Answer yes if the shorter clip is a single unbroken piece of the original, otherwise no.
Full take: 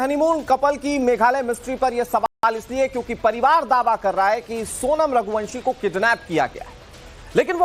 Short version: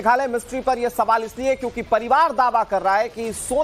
no